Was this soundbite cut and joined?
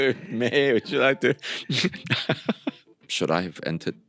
yes; 1 cut; at 2.9 s

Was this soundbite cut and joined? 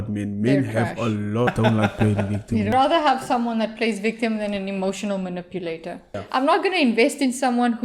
yes; 3 cuts; at 1.5 s, 2.7 s, 6.1 s

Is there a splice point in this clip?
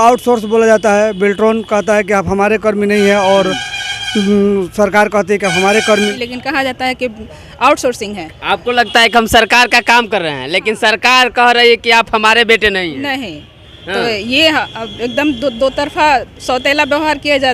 yes; 1 cut; at 6.1 s

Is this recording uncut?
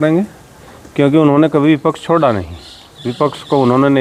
yes; 0 cuts

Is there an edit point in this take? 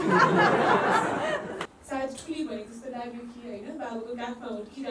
yes; 1 cut; at 1.7 s

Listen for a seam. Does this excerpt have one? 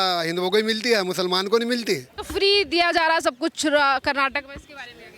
yes; 1 cut; at 2.2 s

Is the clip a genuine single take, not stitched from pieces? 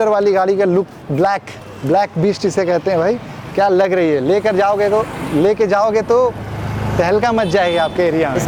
yes; 0 cuts

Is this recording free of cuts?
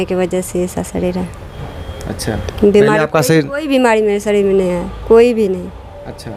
yes; 0 cuts

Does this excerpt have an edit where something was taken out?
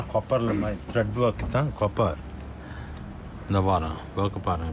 no; 0 cuts

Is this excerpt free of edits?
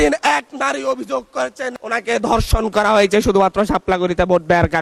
yes; 0 cuts

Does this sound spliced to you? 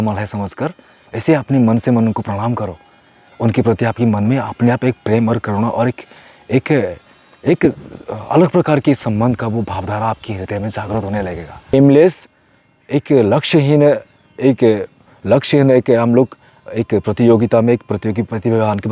yes; 1 cut; at 11.7 s

